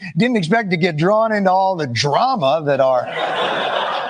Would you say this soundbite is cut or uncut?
uncut